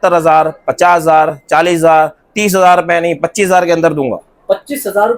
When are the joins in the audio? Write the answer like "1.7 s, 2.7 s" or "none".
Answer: none